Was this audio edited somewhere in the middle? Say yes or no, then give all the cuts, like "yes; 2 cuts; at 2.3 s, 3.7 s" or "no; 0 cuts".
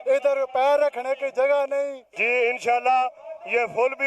yes; 1 cut; at 2.1 s